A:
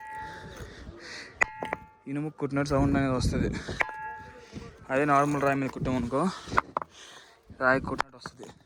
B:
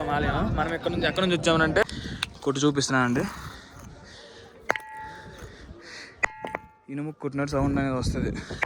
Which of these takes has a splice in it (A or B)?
B